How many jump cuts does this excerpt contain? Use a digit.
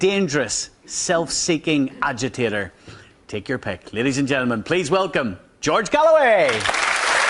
1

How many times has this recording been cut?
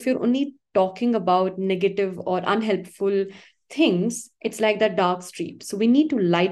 0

